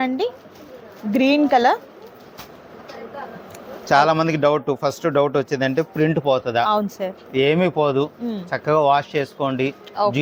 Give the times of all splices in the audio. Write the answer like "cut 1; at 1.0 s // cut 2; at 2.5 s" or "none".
none